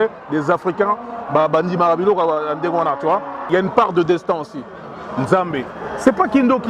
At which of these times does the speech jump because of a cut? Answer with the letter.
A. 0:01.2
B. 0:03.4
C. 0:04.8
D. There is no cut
B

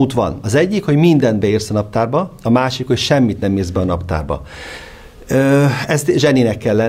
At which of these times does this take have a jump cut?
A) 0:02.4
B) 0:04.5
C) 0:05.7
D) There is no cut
D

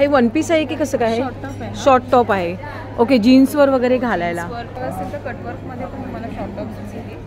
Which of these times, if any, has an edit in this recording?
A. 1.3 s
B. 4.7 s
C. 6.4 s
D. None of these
B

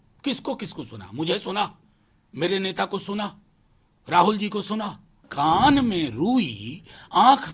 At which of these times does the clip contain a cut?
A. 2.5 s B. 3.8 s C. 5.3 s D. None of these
C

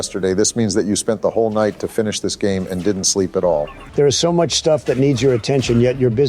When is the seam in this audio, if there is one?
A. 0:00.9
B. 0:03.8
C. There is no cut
B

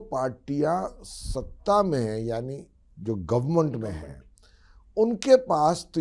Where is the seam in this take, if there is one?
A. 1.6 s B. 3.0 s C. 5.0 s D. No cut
D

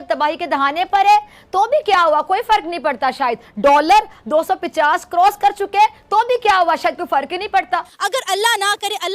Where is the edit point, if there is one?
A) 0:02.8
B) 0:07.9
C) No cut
B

